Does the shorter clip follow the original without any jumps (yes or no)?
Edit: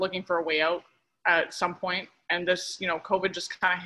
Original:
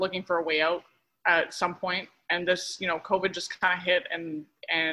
yes